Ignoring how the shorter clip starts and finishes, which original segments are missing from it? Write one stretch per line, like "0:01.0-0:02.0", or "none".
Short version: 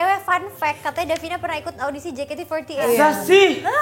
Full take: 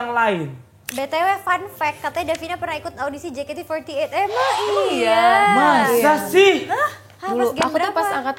0:04.0-0:05.9